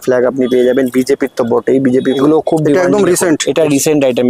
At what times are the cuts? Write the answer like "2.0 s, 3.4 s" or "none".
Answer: 2.2 s